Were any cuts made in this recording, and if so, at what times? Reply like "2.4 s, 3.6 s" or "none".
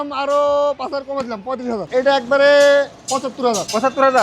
1.8 s